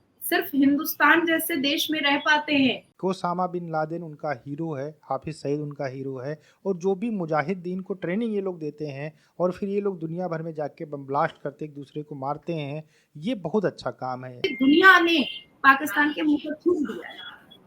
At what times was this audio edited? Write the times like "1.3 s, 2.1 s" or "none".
2.9 s, 14.5 s